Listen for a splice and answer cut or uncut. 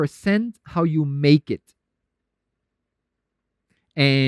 uncut